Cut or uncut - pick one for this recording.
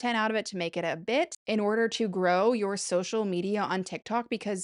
cut